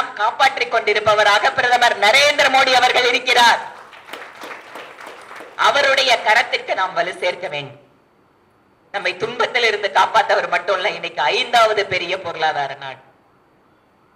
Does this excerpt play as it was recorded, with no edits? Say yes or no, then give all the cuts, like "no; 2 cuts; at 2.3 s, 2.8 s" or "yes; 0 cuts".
yes; 0 cuts